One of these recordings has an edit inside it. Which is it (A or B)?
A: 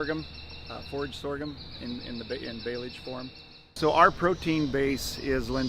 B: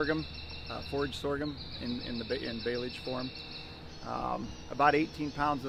A